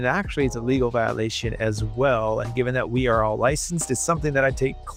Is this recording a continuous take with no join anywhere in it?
yes; 0 cuts

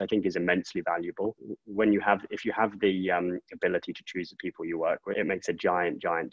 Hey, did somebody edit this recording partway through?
yes; 2 cuts; at 1.5 s, 5.1 s

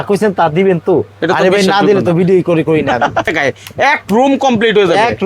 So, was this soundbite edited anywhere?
yes; 1 cut; at 3.3 s

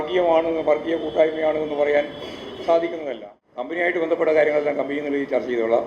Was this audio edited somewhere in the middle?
yes; 1 cut; at 3.7 s

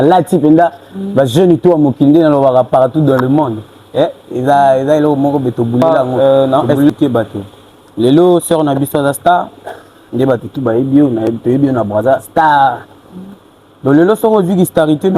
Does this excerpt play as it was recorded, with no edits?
no; 1 cut; at 5.8 s

